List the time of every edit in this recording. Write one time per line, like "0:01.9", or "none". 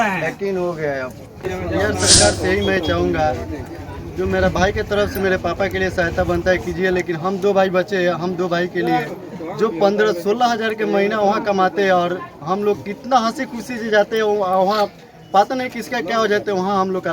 0:01.5

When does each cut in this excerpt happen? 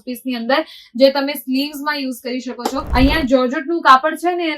0:02.9

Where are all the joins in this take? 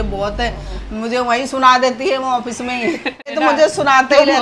0:03.4

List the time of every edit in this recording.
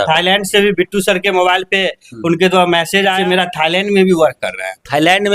0:03.2

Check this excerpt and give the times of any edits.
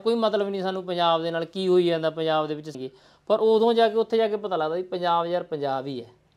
0:02.7

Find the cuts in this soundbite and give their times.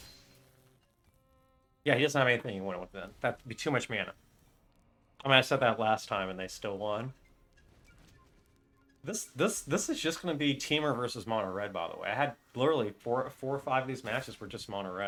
none

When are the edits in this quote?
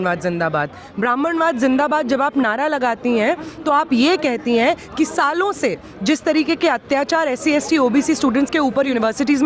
none

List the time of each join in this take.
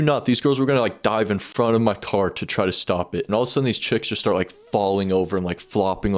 0:03.3

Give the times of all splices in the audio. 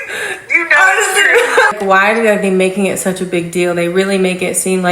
0:01.7

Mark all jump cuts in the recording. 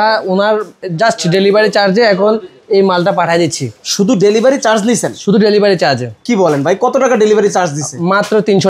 none

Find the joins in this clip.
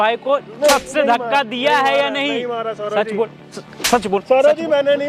none

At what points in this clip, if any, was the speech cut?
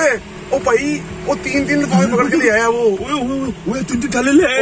none

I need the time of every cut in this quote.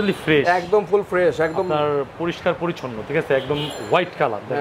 none

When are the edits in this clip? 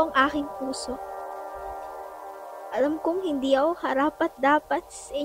0:01.0
0:02.5

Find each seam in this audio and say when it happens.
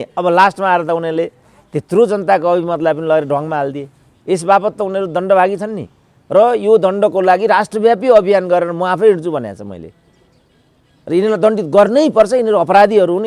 none

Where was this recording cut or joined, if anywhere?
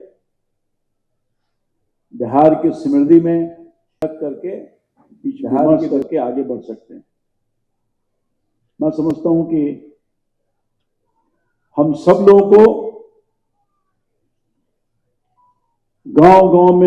0:04.0

